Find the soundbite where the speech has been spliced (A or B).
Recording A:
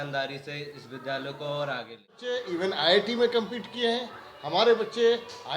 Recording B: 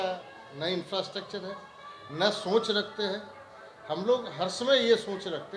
A